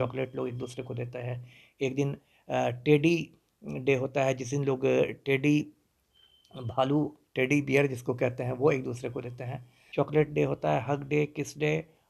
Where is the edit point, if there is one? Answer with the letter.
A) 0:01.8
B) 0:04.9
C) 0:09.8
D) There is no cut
C